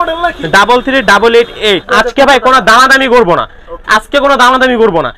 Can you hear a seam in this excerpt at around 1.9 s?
yes; 1 cut; at 1.9 s

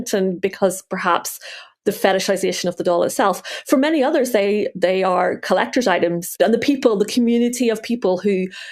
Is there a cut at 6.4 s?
yes; 1 cut; at 6.4 s

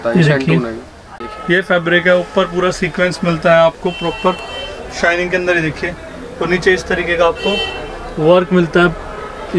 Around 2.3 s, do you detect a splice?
no; 1 cut; at 1.0 s

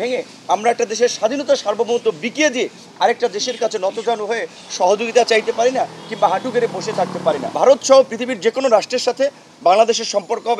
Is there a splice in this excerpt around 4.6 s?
no; 1 cut; at 7.5 s

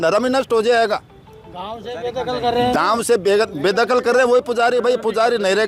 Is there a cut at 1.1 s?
no; 0 cuts

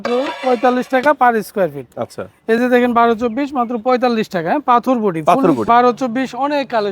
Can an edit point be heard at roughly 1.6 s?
no; 1 cut; at 5.7 s

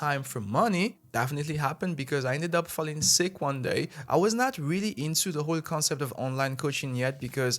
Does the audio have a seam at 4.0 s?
yes; 2 cuts; at 1.0 s, 4.0 s

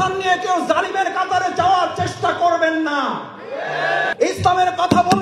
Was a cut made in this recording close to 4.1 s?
yes; 1 cut; at 4.1 s

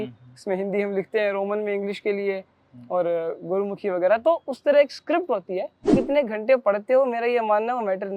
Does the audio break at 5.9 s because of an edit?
yes; 1 cut; at 5.9 s

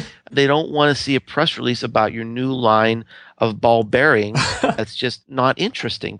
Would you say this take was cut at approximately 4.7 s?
yes; 1 cut; at 4.7 s

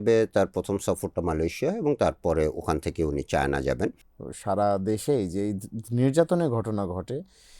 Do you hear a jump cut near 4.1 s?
yes; 1 cut; at 4.1 s

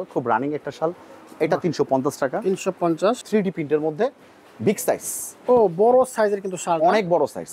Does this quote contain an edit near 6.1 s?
no; 1 cut; at 3.2 s

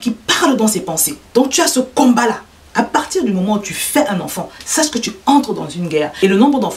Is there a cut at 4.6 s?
no; 1 cut; at 1.2 s

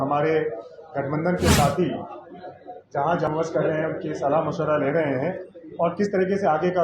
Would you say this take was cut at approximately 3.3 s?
yes; 1 cut; at 3.3 s

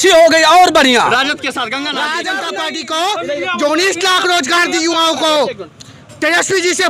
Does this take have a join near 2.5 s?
yes; 1 cut; at 2.5 s

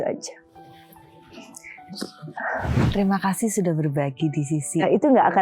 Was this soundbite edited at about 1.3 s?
no; 1 cut; at 2.8 s

